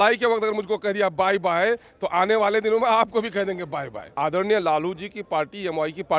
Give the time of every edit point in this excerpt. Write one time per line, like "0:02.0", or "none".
0:04.2

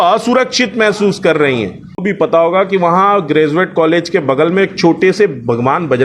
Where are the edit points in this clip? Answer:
0:02.1

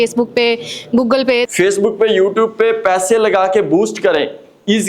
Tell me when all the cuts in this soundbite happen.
0:01.5

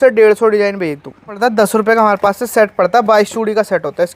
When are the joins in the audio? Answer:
0:01.3

